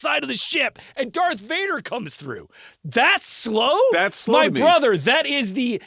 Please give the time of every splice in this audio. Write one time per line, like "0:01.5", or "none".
none